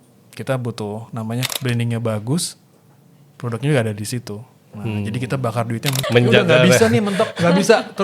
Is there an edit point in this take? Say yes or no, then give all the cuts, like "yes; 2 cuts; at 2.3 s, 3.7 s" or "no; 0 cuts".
yes; 2 cuts; at 1.5 s, 5.9 s